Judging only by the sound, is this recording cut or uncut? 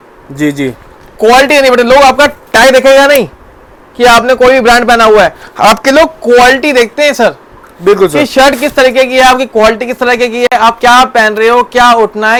uncut